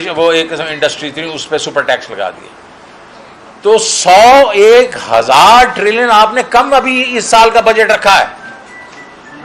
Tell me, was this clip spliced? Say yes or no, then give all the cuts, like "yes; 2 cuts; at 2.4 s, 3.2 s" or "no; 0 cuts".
no; 0 cuts